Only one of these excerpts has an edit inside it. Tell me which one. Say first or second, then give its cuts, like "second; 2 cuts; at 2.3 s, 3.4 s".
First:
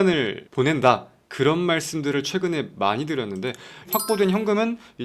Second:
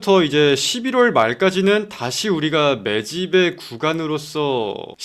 first; 1 cut; at 3.9 s